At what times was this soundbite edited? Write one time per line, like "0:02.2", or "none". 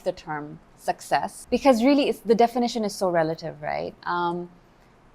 0:01.4